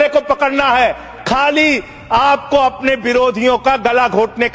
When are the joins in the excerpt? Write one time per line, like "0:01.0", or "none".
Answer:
0:01.1